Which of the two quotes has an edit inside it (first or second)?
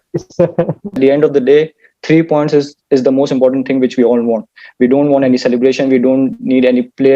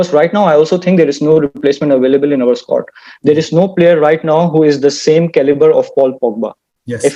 first